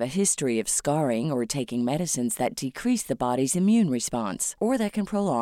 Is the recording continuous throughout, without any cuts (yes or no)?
yes